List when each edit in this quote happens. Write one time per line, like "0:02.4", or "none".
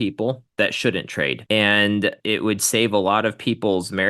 0:01.4
0:02.2